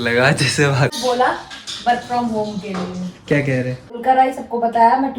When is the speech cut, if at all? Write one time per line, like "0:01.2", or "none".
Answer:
0:01.0
0:04.0